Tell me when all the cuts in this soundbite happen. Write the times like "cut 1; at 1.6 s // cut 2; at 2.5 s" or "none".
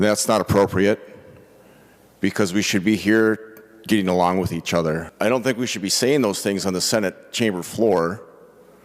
cut 1; at 5.1 s